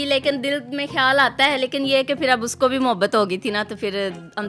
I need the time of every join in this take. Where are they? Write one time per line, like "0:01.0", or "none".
none

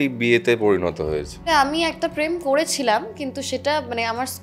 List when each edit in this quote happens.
0:01.4

